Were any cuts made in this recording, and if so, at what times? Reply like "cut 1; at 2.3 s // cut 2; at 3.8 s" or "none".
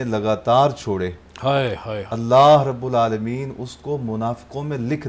cut 1; at 2.1 s

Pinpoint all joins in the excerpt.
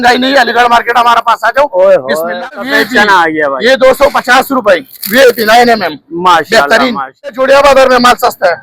cut 1; at 2.6 s // cut 2; at 7.3 s

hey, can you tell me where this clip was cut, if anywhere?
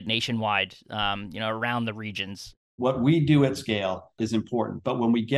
cut 1; at 2.8 s // cut 2; at 4.1 s

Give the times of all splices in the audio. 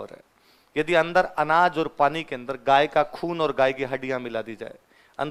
none

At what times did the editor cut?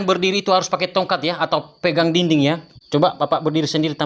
none

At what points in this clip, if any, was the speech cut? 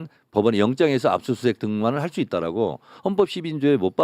none

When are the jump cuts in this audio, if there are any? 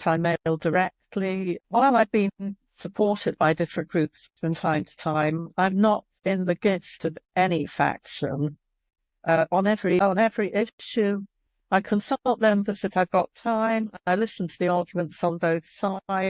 cut 1; at 1.6 s // cut 2; at 6.2 s // cut 3; at 10.0 s

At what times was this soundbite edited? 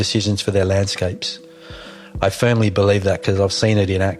none

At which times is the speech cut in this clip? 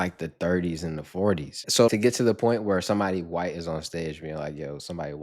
cut 1; at 1.7 s

